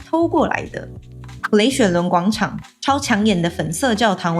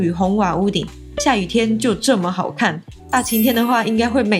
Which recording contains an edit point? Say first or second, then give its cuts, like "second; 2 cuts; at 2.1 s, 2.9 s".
first; 2 cuts; at 1.2 s, 2.7 s